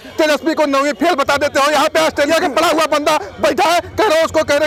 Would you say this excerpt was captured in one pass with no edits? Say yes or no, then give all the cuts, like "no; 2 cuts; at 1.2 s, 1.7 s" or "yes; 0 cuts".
yes; 0 cuts